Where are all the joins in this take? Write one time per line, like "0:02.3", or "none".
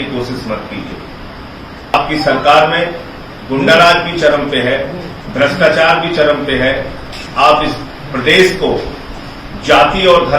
0:01.9